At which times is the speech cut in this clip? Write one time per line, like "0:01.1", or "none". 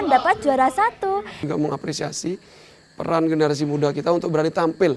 0:01.4